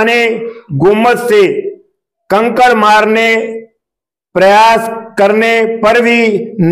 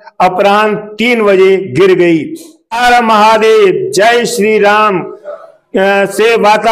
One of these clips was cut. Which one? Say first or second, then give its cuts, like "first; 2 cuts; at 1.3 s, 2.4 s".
second; 1 cut; at 2.8 s